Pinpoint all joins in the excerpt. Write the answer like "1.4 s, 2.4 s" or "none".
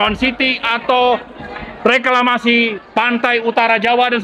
none